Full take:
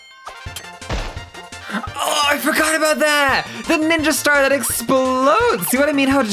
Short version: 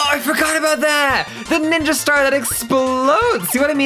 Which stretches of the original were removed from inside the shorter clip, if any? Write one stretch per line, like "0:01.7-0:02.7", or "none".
none